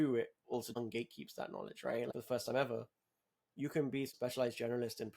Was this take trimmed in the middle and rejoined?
yes; 3 cuts; at 0.8 s, 2.1 s, 4.1 s

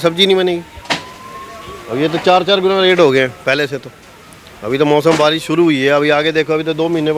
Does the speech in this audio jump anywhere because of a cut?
no; 0 cuts

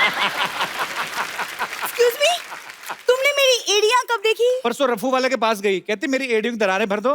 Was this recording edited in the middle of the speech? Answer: no; 0 cuts

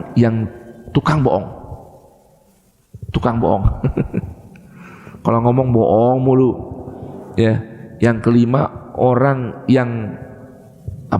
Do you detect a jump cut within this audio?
no; 0 cuts

